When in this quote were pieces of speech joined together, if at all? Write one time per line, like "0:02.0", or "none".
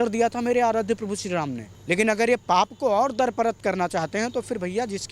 0:01.7